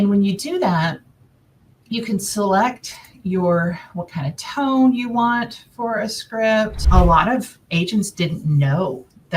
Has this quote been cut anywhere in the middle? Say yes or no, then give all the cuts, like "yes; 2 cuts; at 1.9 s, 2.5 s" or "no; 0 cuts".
yes; 1 cut; at 6.8 s